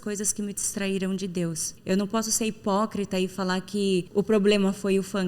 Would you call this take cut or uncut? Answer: cut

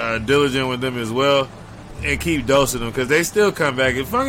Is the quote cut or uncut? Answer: uncut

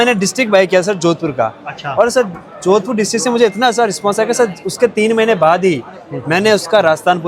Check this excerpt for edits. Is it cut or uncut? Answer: uncut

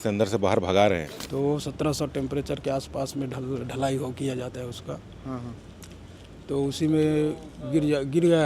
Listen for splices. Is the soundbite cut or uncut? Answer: cut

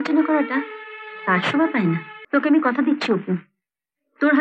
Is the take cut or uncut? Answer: cut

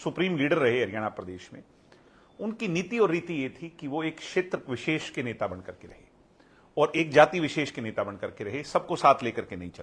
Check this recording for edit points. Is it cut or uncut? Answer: uncut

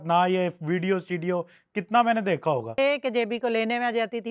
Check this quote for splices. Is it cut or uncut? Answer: cut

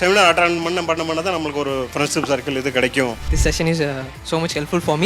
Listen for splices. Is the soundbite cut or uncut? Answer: cut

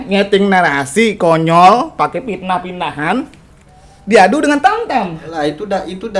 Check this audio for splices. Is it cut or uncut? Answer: cut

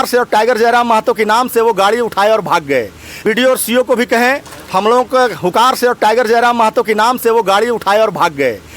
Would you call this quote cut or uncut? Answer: uncut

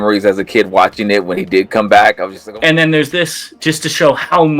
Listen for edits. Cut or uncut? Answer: cut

